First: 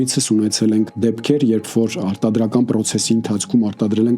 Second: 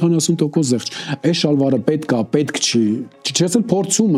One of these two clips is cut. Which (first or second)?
first